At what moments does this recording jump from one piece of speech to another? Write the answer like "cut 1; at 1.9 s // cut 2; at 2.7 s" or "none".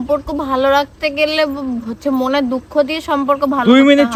none